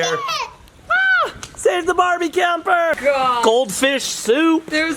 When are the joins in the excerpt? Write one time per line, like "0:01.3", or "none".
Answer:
0:03.0